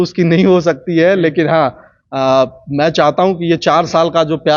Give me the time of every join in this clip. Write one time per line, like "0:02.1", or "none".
none